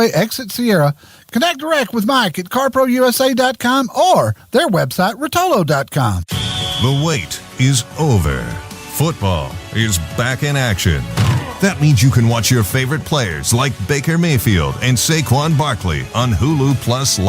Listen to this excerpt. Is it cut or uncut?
cut